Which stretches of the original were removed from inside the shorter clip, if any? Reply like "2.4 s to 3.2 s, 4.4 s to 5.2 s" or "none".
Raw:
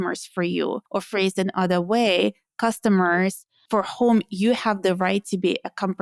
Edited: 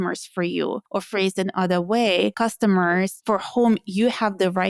2.3 s to 2.6 s, 3.4 s to 3.6 s